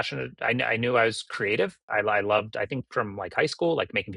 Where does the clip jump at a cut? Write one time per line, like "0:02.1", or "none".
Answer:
0:01.8